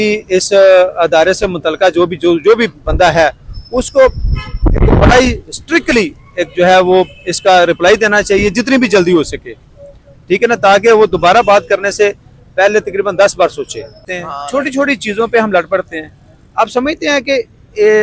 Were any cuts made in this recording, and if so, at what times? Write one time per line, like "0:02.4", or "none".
0:14.0